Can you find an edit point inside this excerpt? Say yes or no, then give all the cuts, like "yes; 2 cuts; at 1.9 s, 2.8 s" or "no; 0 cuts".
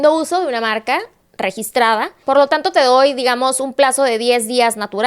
yes; 1 cut; at 2.2 s